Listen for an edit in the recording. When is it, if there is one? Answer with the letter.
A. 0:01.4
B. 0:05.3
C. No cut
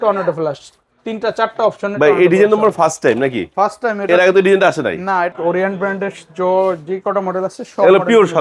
B